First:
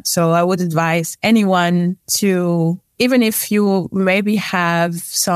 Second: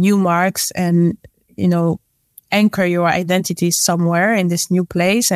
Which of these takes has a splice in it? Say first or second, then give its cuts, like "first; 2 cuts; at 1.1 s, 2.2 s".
first; 3 cuts; at 1.1 s, 2.1 s, 2.8 s